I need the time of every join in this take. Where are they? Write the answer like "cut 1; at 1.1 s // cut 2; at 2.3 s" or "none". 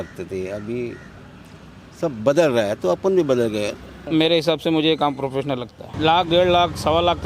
cut 1; at 4.0 s // cut 2; at 5.8 s